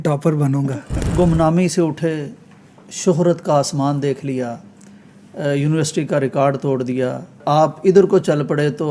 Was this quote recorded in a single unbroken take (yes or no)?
no